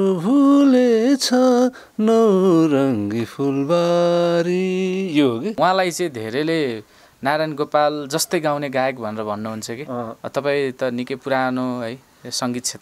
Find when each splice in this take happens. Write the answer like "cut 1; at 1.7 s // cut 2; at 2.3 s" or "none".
cut 1; at 5.5 s